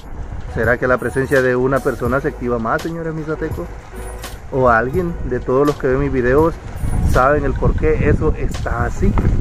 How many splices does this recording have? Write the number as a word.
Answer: zero